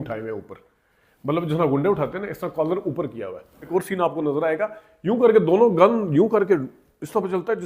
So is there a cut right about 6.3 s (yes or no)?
no